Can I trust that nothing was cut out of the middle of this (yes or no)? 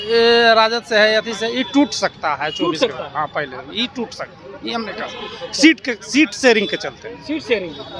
yes